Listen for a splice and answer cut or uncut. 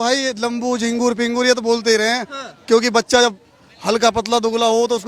uncut